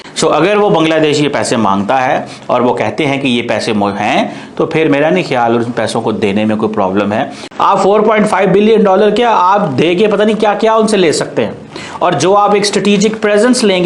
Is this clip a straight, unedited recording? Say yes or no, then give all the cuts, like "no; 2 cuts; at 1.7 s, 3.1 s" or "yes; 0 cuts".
no; 1 cut; at 7.4 s